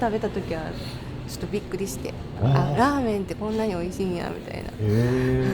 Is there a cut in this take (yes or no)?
no